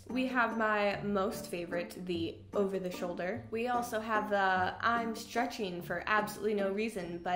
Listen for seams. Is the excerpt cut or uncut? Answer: cut